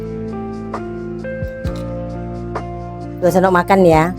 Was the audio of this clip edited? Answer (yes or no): no